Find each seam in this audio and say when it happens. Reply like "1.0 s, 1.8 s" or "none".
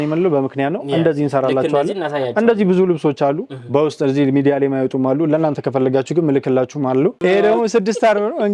7.2 s